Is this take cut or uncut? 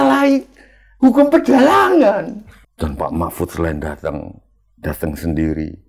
cut